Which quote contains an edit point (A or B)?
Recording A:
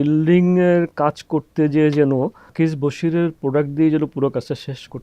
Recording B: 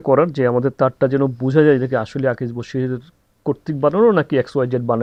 A